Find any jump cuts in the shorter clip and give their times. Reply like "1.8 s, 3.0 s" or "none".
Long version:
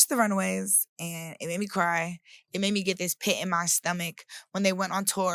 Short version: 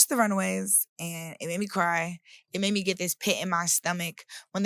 none